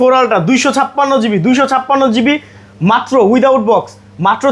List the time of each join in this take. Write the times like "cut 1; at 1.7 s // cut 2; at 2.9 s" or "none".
none